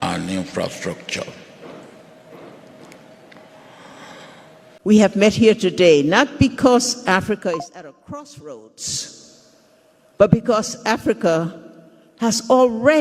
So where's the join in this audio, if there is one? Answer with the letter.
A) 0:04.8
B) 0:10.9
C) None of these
A